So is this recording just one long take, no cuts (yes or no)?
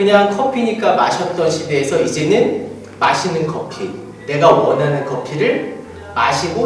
yes